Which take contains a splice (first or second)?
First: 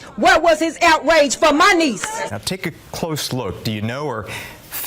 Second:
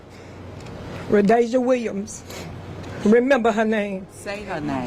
first